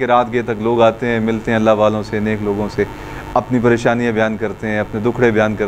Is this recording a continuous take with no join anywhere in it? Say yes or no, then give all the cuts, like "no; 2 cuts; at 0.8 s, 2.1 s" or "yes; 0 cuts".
yes; 0 cuts